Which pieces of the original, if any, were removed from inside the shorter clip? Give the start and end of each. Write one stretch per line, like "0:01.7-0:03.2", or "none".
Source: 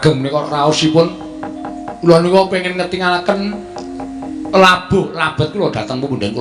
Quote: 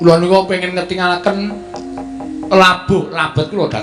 none